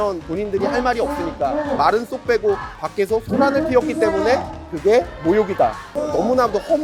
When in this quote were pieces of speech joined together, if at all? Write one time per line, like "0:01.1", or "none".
0:02.7
0:06.0